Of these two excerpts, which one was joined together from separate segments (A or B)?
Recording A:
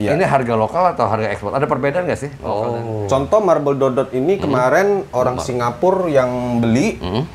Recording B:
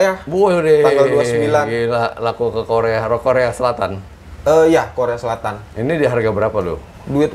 A